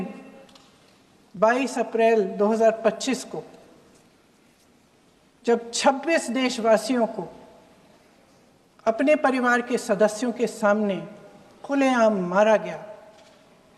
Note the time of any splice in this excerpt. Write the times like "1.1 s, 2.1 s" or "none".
none